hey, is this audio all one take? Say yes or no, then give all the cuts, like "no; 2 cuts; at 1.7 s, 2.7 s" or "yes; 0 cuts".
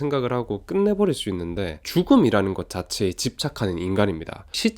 no; 1 cut; at 1.8 s